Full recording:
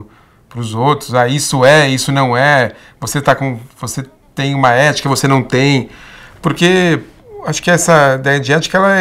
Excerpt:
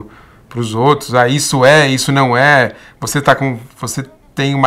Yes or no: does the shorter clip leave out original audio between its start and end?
no